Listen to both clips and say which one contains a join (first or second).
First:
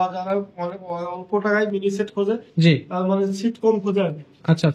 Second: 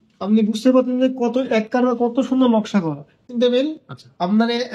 second